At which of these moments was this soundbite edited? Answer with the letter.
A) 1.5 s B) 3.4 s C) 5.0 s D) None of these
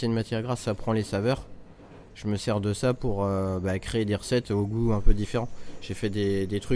D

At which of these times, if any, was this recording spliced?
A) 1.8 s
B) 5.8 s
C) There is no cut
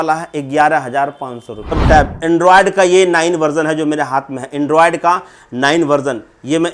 A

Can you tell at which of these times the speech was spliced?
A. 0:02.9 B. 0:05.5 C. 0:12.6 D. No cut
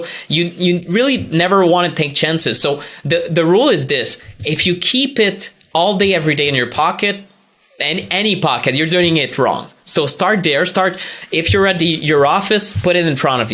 D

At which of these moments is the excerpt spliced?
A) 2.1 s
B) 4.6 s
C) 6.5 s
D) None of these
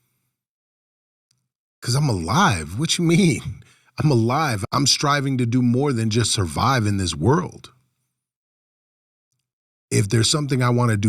B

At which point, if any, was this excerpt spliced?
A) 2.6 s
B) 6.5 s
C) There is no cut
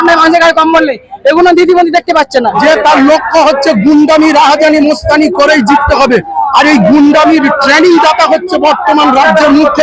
A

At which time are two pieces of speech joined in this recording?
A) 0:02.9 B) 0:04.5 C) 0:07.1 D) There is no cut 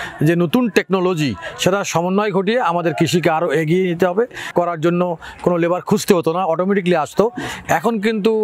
B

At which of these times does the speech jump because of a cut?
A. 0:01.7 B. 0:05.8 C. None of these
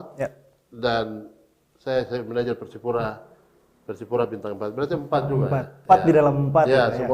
B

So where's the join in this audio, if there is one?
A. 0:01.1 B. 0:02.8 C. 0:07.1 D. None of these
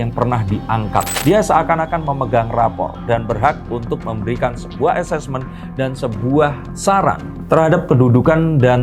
A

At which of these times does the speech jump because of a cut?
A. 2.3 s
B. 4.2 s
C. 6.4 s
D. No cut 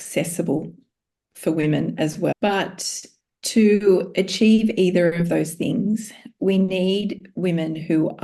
A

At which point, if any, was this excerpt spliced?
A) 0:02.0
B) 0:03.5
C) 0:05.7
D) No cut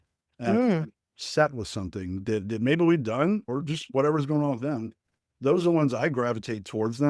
B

